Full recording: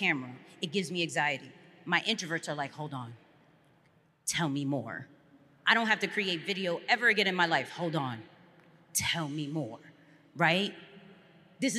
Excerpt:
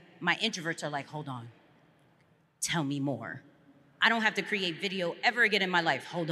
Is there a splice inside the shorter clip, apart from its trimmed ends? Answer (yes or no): no